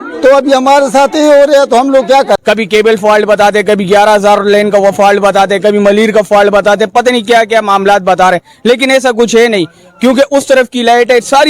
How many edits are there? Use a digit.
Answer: 1